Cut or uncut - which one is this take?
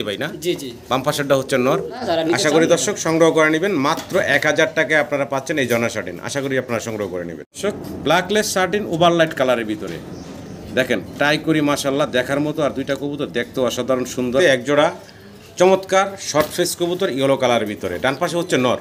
cut